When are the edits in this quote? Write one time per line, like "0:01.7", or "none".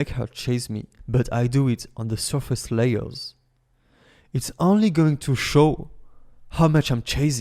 none